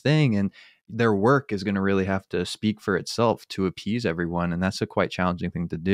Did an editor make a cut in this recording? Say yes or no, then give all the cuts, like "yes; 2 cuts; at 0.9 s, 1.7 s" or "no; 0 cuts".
no; 0 cuts